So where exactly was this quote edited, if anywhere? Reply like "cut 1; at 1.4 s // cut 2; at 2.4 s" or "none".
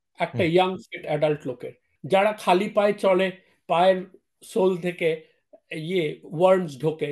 cut 1; at 1.9 s